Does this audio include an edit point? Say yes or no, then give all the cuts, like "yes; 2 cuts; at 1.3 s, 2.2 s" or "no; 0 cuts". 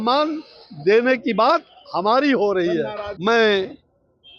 yes; 1 cut; at 3.0 s